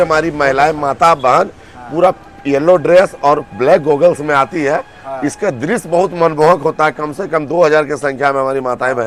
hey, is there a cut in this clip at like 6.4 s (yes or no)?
no